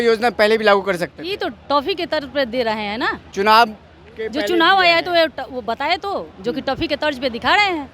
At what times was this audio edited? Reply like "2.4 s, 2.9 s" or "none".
none